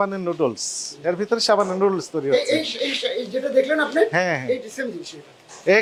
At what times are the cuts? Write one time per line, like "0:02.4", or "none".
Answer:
none